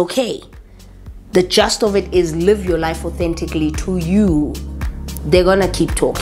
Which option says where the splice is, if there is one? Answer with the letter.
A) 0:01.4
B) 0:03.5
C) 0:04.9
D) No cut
D